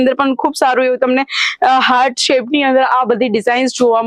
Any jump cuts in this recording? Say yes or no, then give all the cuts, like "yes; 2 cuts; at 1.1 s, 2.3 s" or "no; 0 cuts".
no; 0 cuts